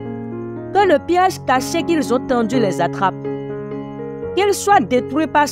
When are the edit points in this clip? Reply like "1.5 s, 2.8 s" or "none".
3.1 s, 4.4 s